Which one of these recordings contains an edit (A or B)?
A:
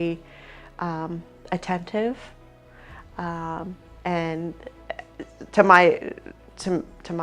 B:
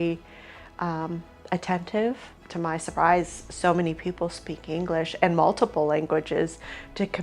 B